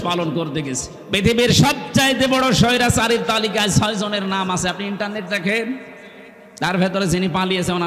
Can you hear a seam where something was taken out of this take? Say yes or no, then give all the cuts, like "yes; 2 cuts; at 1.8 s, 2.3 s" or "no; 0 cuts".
yes; 1 cut; at 0.9 s